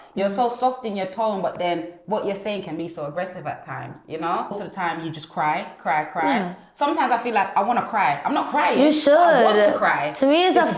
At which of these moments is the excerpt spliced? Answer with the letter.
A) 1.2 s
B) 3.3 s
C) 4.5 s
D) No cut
C